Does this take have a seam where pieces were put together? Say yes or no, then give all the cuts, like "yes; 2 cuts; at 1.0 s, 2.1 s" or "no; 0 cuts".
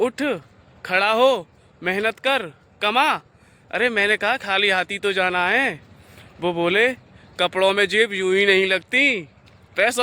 no; 0 cuts